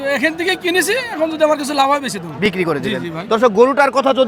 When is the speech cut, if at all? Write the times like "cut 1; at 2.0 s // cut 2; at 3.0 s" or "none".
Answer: none